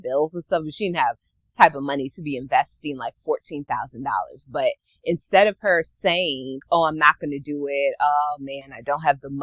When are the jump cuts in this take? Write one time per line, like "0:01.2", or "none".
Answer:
0:06.6